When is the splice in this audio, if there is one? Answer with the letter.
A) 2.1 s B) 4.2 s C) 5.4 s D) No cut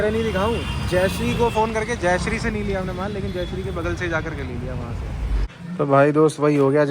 C